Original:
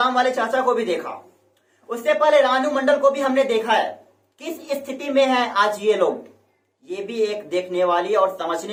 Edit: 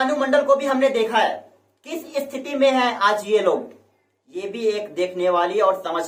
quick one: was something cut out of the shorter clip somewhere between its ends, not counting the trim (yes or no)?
no